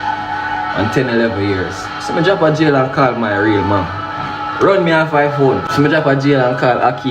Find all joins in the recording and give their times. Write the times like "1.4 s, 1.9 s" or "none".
5.7 s